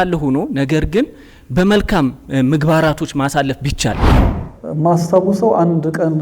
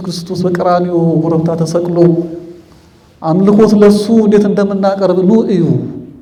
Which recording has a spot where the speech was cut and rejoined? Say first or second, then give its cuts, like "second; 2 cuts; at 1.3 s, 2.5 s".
first; 1 cut; at 4.1 s